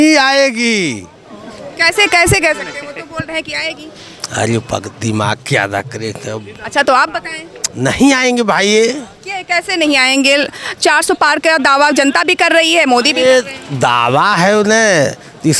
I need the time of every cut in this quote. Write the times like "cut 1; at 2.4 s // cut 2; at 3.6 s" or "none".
none